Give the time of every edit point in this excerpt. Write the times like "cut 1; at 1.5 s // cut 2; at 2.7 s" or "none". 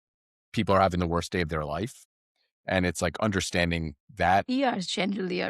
cut 1; at 4.5 s